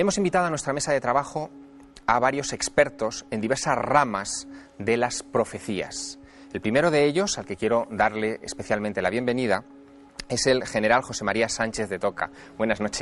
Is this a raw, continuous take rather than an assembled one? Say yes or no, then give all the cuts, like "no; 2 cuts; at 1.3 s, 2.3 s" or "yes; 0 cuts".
no; 1 cut; at 8.5 s